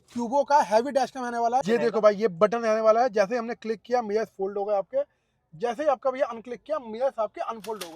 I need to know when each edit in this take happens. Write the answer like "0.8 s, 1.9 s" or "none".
1.6 s